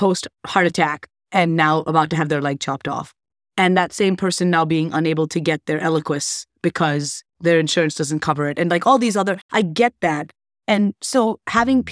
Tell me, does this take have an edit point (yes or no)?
no